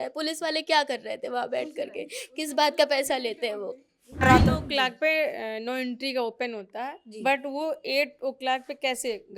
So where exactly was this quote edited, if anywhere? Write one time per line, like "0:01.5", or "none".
0:04.2